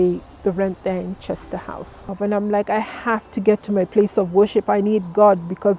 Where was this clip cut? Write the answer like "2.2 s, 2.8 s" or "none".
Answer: 2.1 s